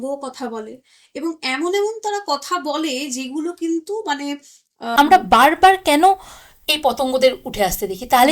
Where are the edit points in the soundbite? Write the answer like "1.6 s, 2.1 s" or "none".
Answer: 4.9 s